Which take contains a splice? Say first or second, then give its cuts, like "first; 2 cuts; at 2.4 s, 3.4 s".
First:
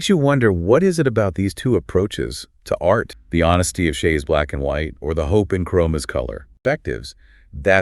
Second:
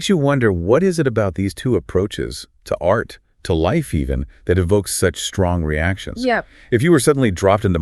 first; 2 cuts; at 3.2 s, 6.5 s